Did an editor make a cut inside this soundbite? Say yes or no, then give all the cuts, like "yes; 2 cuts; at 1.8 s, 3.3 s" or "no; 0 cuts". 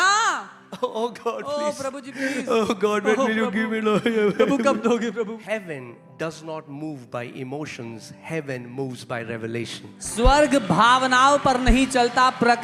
yes; 1 cut; at 5.4 s